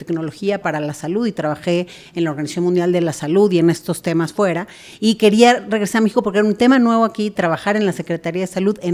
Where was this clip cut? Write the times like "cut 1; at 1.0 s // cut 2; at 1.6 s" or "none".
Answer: none